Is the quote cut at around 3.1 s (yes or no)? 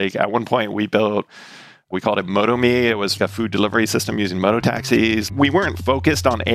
yes